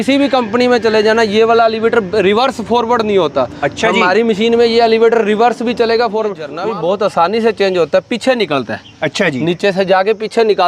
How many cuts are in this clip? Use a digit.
1